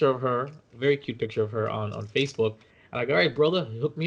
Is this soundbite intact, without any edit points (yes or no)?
yes